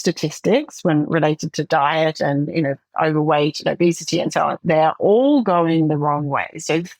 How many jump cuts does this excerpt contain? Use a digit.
0